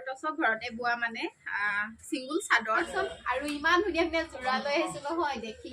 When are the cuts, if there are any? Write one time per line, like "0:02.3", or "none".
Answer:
0:02.9